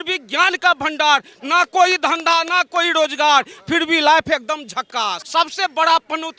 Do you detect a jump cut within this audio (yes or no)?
yes